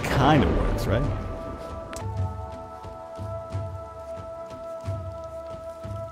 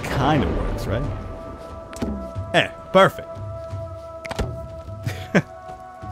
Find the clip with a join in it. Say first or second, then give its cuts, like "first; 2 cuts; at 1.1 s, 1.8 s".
first; 1 cut; at 1.9 s